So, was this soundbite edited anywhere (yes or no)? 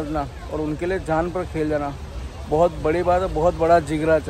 no